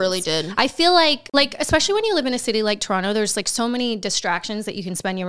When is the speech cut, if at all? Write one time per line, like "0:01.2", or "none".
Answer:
0:01.2